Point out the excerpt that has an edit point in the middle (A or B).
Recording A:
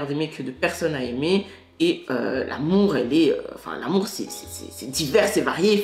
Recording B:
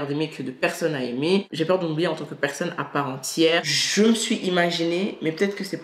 B